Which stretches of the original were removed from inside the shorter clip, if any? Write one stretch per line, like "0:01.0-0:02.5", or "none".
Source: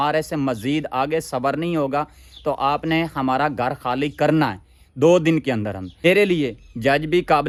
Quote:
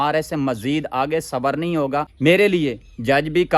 0:02.1-0:05.9